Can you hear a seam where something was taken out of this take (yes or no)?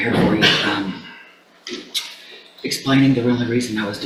no